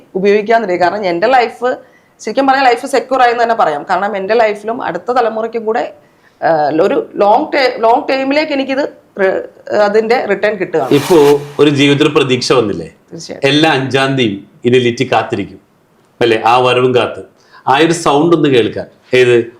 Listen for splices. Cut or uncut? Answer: uncut